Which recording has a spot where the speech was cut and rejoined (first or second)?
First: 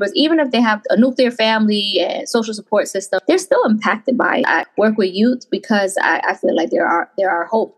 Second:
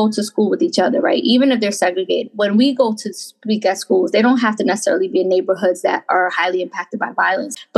first